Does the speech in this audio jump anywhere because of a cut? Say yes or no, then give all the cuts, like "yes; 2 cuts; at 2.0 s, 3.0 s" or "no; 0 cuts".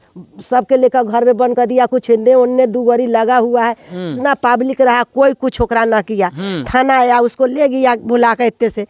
no; 0 cuts